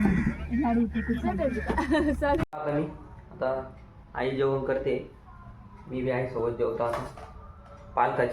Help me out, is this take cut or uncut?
cut